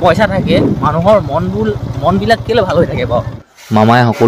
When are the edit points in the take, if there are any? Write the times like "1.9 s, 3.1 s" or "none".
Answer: 3.4 s

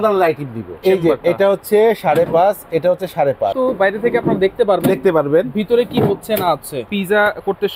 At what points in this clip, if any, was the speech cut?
0.8 s, 3.5 s, 6.9 s

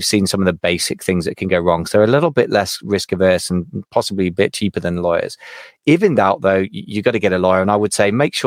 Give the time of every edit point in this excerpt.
none

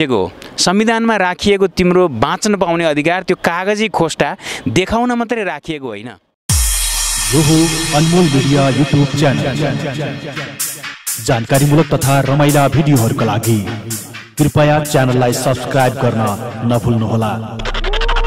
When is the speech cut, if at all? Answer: 6.0 s

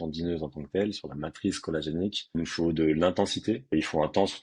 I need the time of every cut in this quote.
2.3 s, 3.7 s

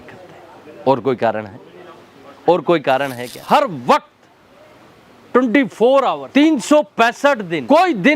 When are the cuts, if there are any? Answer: 3.4 s

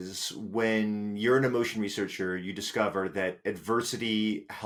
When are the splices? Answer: none

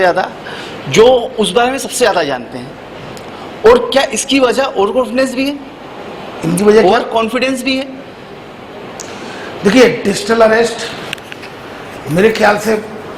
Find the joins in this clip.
none

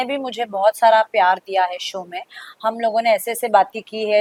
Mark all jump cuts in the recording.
none

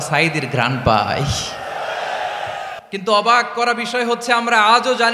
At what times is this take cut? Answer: 2.8 s

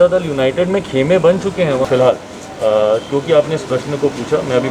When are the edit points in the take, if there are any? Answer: 1.8 s

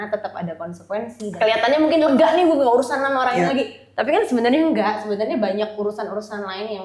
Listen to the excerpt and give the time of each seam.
1.2 s

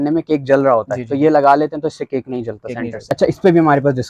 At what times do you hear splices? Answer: 3.1 s

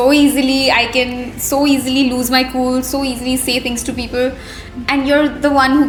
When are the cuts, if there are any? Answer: none

